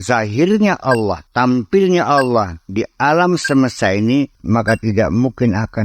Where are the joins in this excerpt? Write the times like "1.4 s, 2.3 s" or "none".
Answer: 1.2 s, 4.4 s